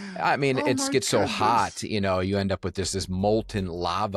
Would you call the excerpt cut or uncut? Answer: uncut